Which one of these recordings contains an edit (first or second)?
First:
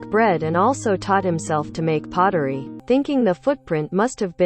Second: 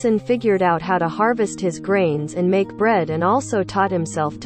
first